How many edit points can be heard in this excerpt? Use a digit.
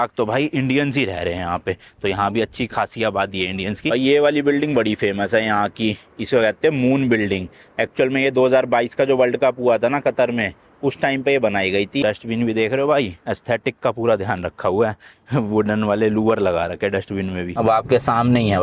3